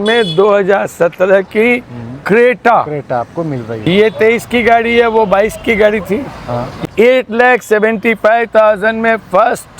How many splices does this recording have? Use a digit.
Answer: 2